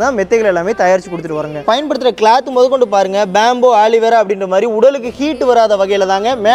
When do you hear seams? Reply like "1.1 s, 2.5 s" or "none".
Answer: 1.6 s

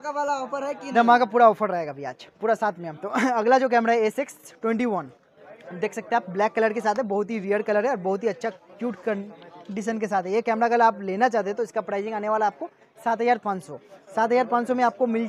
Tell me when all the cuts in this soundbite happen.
none

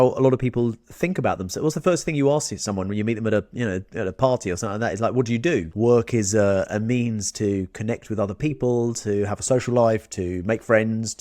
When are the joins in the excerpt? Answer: 5.7 s

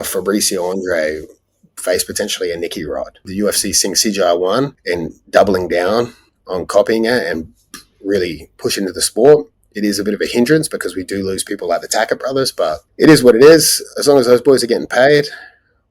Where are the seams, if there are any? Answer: 3.2 s, 4.8 s, 12.9 s

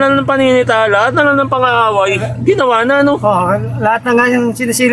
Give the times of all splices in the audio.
none

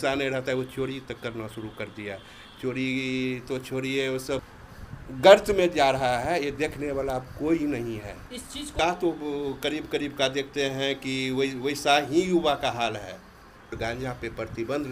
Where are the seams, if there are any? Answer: 4.3 s, 8.7 s, 13.7 s

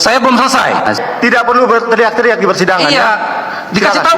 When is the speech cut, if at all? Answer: 1.0 s

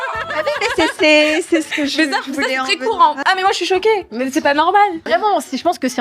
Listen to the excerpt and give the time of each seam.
3.2 s, 5.0 s

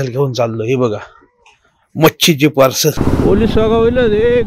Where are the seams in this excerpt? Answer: 3.0 s

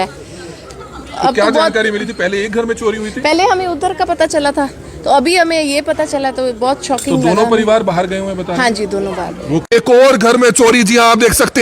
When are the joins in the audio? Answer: 9.6 s

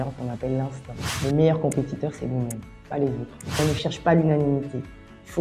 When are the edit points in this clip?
1.1 s, 3.6 s

